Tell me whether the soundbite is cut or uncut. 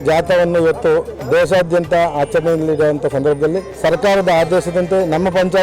cut